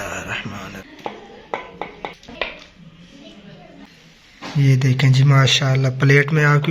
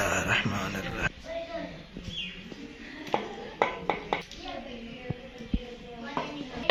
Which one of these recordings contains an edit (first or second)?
first